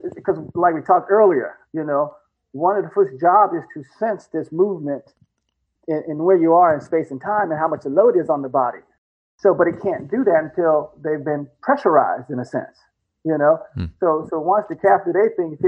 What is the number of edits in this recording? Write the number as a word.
one